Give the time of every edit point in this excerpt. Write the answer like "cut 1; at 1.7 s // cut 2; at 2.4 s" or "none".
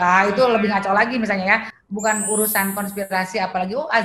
cut 1; at 1.7 s